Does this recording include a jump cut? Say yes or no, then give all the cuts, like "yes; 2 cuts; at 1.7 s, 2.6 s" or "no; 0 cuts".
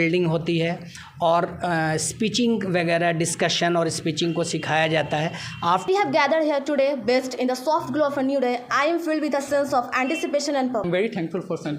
yes; 2 cuts; at 5.8 s, 10.8 s